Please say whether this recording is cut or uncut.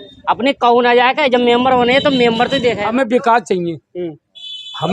cut